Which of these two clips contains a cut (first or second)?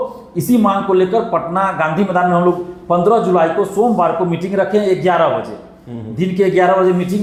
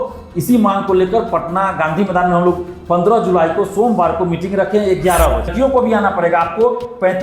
second